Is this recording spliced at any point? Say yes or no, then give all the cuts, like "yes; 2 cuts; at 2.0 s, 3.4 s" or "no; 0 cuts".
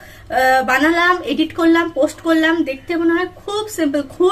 no; 0 cuts